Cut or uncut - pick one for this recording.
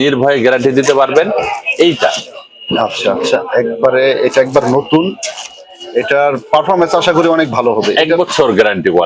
uncut